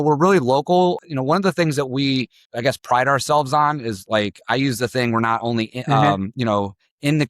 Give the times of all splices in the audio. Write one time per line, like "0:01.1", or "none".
0:01.0
0:02.4